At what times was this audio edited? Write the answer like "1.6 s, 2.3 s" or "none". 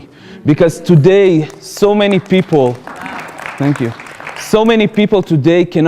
1.6 s